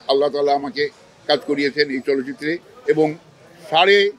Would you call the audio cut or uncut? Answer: uncut